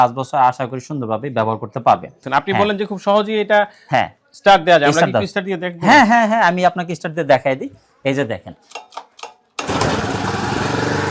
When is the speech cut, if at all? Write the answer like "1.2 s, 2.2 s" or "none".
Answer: 2.1 s